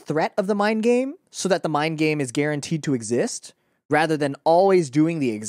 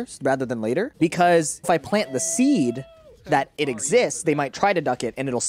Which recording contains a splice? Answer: second; 2 cuts; at 0.9 s, 1.7 s

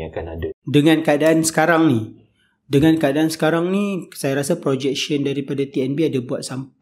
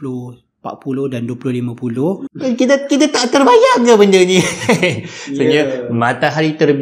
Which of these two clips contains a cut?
second; 1 cut; at 2.3 s

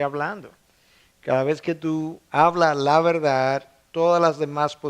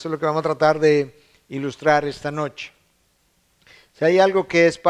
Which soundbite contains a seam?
first; 1 cut; at 2.8 s

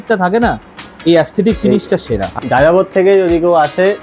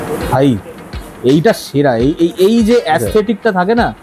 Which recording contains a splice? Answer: first; 1 cut; at 2.3 s

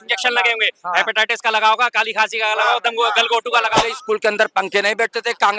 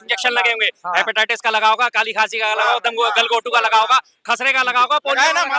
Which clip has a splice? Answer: first; 1 cut; at 3.8 s

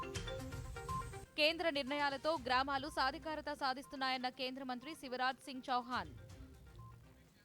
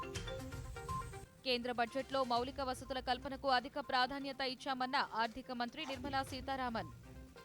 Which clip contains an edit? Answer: second; 1 cut; at 1.3 s

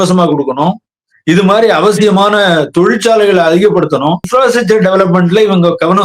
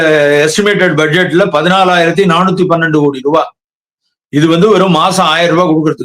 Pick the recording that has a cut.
first; 1 cut; at 4.3 s

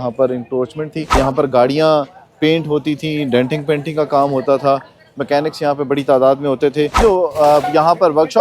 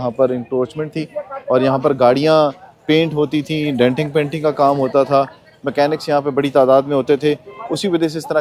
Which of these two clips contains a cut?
first; 2 cuts; at 1.1 s, 7.0 s

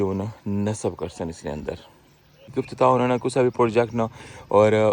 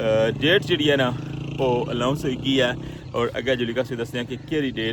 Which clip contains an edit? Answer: first; 1 cut; at 2.5 s

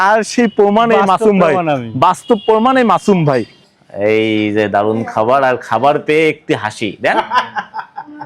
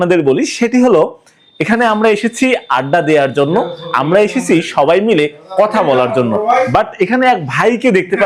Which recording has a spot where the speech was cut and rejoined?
first; 1 cut; at 3.5 s

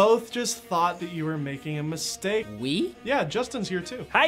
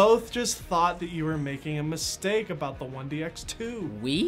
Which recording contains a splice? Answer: first; 1 cut; at 2.5 s

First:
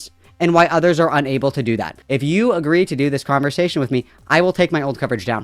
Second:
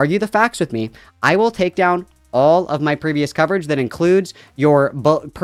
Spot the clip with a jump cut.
first; 1 cut; at 1.9 s

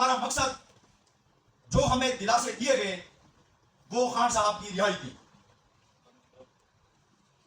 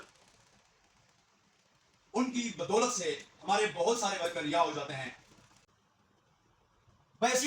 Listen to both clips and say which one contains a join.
second; 1 cut; at 5.7 s

